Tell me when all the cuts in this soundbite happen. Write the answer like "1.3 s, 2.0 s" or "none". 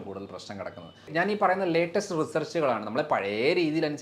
1.1 s